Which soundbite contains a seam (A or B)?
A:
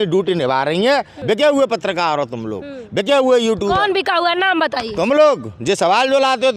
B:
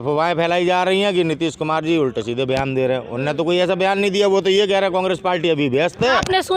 A